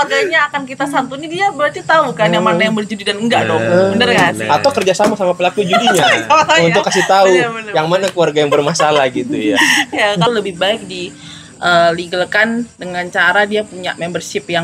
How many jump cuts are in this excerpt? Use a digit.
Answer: 1